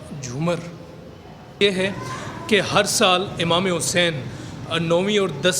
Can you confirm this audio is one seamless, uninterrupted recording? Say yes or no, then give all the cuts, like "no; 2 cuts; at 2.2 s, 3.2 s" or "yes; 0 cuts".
no; 1 cut; at 1.6 s